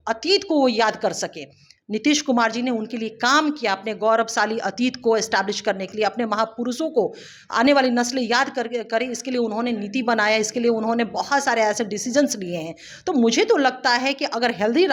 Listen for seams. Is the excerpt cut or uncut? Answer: uncut